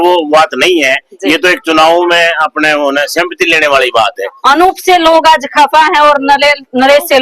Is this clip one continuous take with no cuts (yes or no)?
no